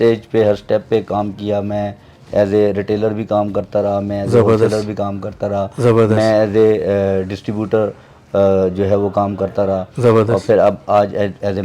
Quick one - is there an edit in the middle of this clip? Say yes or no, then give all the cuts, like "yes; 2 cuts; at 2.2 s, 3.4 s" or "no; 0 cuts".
no; 0 cuts